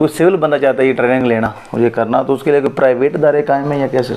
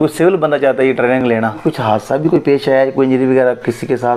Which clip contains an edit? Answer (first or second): second